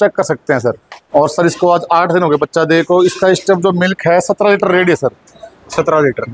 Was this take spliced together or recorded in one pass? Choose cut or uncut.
cut